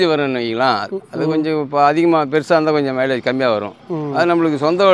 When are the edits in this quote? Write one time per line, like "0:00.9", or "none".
none